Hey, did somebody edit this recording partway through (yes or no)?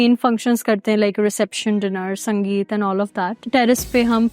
no